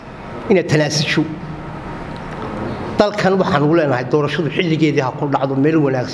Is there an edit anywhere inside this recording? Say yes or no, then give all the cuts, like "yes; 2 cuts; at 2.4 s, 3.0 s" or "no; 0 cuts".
no; 0 cuts